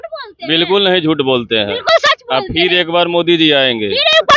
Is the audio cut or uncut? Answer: uncut